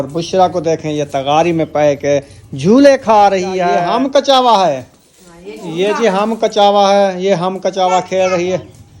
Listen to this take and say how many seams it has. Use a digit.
1